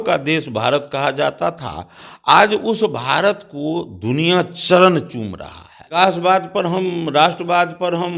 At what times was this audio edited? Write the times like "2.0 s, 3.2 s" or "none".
6.0 s